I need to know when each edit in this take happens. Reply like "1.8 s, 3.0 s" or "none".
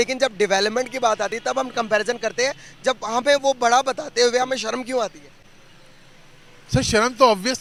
none